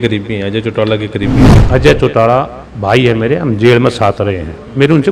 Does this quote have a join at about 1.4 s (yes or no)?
yes